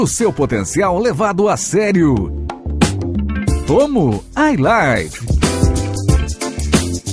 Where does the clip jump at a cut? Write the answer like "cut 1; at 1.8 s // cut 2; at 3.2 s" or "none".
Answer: none